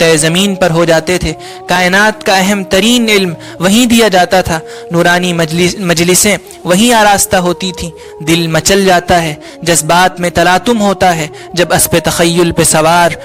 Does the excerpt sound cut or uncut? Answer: uncut